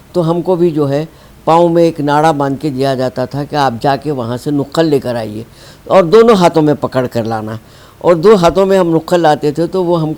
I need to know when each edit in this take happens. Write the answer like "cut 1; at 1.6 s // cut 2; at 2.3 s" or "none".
none

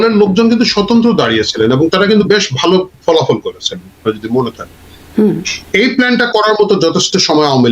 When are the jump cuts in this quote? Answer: none

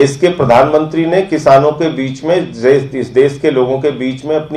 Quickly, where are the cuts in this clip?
none

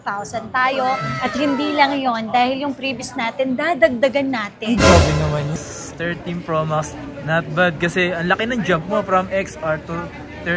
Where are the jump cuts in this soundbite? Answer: cut 1; at 5.5 s

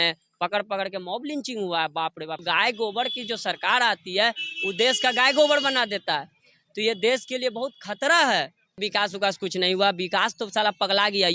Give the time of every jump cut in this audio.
cut 1; at 2.4 s // cut 2; at 8.8 s

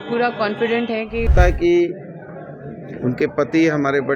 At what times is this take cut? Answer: cut 1; at 1.3 s

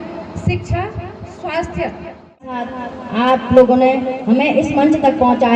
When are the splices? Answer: cut 1; at 2.5 s

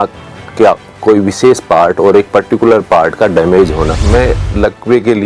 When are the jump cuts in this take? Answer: cut 1; at 4.0 s

